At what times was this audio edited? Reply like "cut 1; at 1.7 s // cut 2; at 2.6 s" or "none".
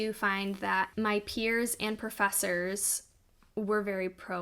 cut 1; at 0.9 s